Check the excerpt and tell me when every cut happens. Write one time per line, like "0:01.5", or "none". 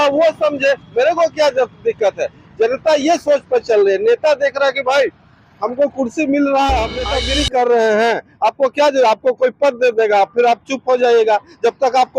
0:07.2